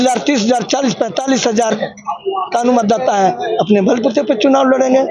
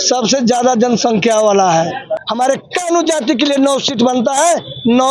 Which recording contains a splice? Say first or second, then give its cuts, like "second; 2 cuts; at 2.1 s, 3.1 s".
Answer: second; 1 cut; at 2.2 s